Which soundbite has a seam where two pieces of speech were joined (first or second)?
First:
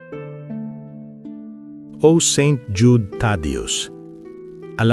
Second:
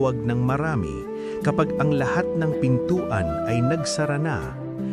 first